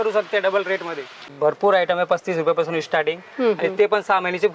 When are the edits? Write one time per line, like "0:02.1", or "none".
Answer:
0:01.4